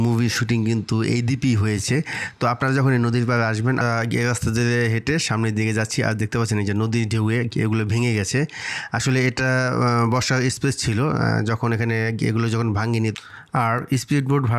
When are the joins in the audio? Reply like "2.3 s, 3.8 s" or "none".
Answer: 3.8 s, 13.2 s